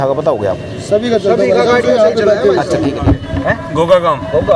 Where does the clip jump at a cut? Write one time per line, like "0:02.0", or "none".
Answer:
0:03.0

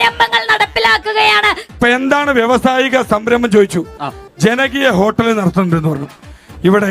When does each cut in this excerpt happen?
0:01.7

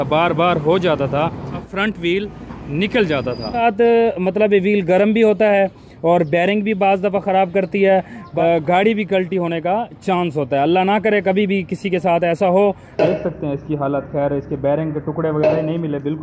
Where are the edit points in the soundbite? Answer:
0:01.7
0:03.6
0:08.2
0:12.9

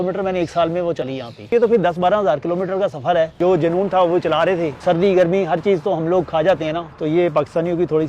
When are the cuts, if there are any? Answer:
0:01.5
0:03.4
0:04.7
0:06.9

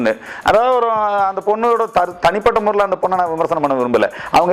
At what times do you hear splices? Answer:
none

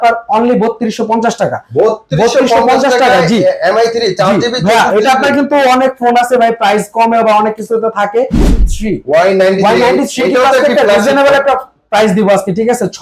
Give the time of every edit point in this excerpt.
0:08.6

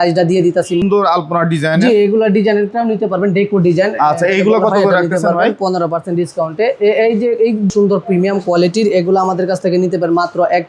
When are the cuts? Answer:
0:00.8
0:07.7

